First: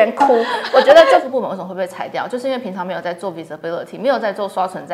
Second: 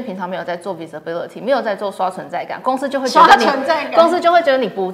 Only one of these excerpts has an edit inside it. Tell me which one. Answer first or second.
first